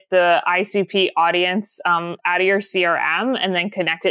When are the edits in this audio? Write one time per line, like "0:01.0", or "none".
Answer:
none